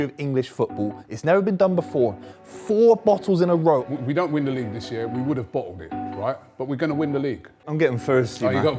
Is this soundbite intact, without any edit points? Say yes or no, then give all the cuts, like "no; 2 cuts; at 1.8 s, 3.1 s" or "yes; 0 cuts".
no; 2 cuts; at 3.9 s, 7.6 s